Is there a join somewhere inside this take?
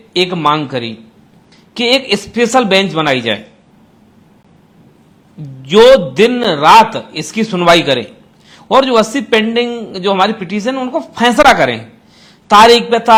no; 0 cuts

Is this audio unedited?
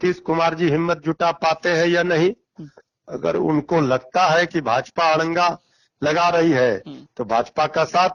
yes; 0 cuts

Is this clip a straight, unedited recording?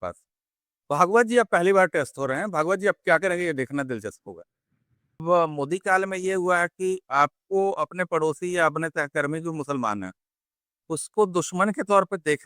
no; 1 cut; at 5.2 s

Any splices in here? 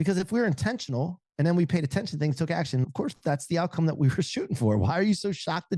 yes; 1 cut; at 2.8 s

